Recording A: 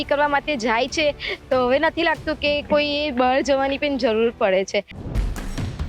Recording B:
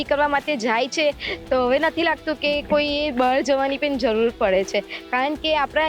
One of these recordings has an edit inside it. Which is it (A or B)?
A